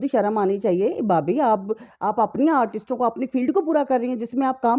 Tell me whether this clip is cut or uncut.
uncut